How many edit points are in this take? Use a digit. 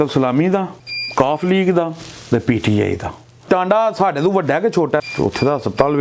2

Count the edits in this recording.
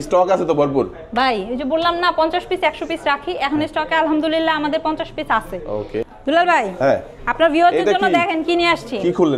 0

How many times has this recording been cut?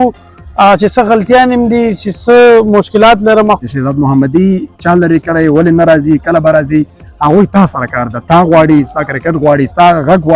1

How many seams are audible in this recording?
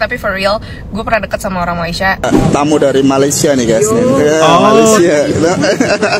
1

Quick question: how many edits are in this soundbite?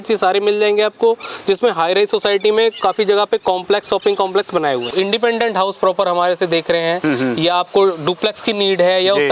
1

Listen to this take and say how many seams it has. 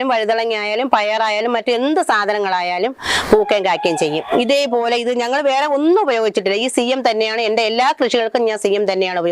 0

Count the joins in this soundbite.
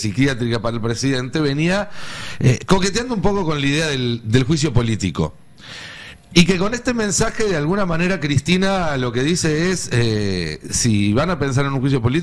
0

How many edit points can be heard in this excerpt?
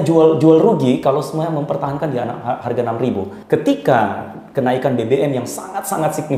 1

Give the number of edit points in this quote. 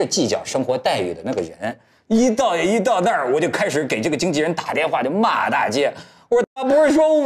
1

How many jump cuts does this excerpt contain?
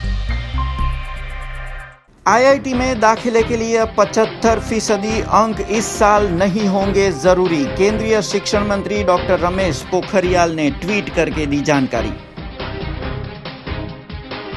1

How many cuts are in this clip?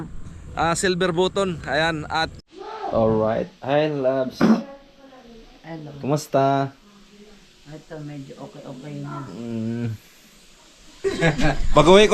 2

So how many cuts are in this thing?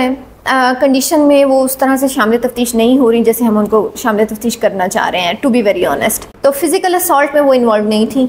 1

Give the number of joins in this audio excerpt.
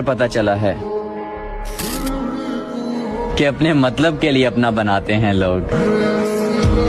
0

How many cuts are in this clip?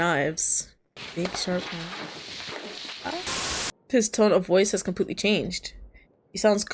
1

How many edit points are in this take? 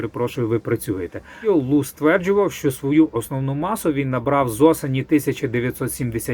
1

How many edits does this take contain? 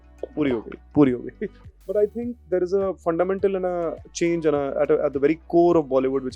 1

